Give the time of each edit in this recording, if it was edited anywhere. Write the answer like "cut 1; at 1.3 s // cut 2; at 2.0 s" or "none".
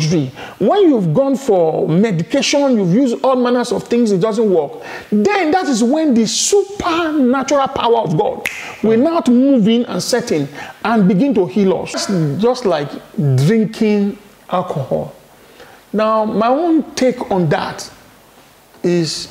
cut 1; at 12.0 s